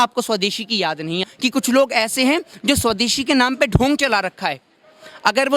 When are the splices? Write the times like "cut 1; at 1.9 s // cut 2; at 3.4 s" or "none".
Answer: cut 1; at 1.3 s